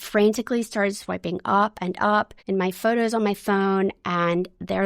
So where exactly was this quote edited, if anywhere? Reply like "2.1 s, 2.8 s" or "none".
2.4 s